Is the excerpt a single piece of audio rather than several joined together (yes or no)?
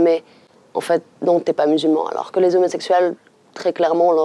yes